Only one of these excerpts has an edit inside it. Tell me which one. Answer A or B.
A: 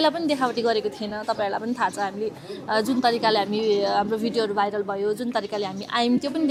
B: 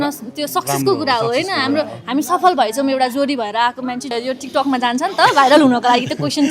B